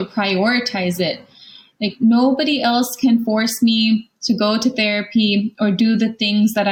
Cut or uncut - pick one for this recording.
uncut